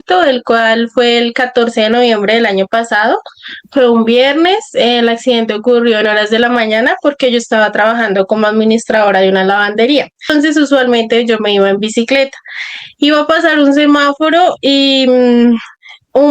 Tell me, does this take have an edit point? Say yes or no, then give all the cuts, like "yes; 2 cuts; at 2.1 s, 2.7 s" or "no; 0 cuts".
yes; 1 cut; at 10.3 s